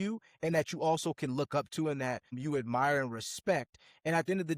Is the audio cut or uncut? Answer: cut